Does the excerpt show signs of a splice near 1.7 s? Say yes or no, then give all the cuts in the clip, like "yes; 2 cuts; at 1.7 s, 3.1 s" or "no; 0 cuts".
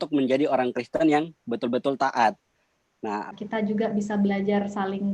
no; 1 cut; at 3.4 s